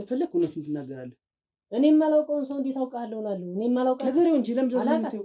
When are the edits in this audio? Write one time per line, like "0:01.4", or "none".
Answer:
none